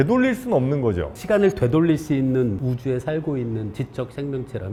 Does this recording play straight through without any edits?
yes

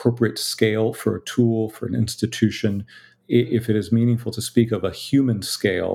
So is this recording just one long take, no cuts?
yes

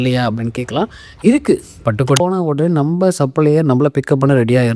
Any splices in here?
yes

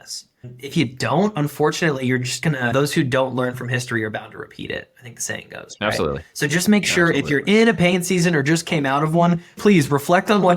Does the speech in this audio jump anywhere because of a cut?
yes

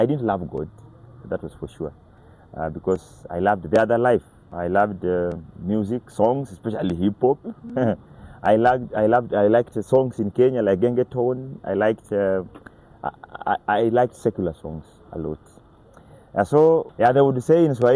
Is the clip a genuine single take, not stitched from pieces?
no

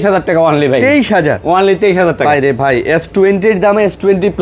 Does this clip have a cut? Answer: no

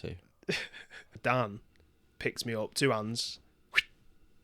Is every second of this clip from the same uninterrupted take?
no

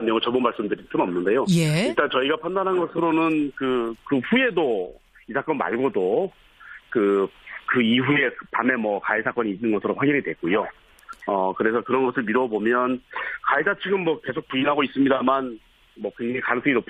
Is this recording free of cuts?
no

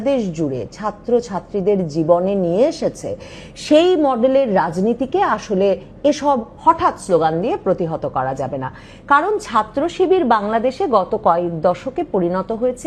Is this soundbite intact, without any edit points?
yes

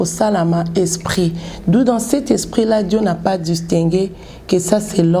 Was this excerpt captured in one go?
yes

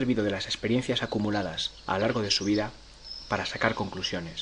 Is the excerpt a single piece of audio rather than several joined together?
no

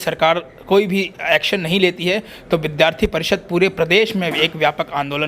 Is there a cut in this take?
no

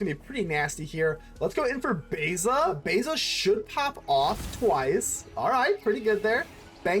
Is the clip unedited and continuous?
no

